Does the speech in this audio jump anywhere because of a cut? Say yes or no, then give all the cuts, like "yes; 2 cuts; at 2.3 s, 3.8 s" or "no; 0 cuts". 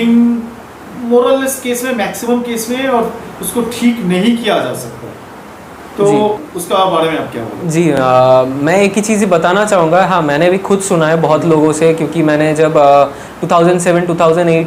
no; 0 cuts